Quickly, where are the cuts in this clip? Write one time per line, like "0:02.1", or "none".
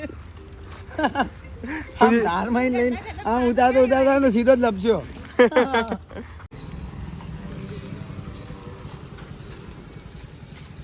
0:06.5